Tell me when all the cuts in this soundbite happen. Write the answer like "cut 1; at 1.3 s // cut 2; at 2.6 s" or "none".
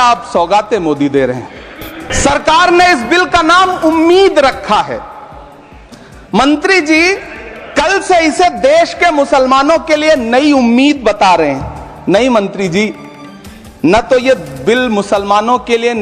cut 1; at 2.1 s